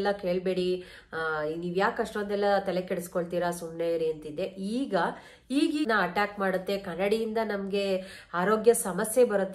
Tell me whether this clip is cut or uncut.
cut